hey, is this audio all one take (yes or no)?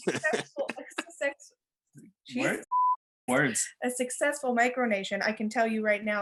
yes